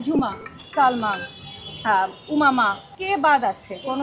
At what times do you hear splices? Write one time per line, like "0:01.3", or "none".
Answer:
0:02.9